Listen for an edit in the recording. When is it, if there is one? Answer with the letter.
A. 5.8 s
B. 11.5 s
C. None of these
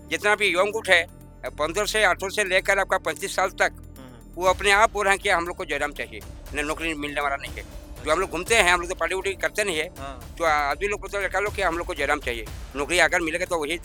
C